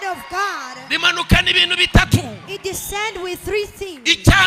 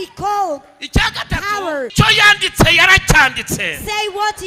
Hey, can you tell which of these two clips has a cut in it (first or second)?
second